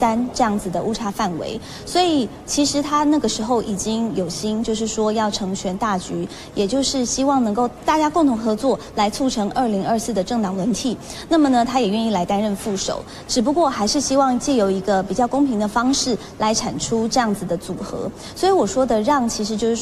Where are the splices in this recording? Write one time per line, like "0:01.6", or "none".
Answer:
none